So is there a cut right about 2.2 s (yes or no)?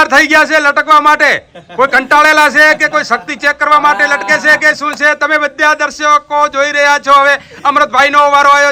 no